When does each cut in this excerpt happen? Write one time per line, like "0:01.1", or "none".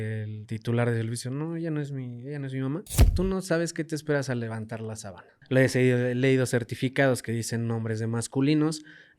0:03.1
0:05.3